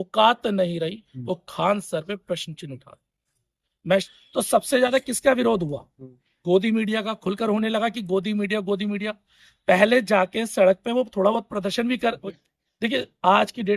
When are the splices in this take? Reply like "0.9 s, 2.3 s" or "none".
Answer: 4.1 s, 12.2 s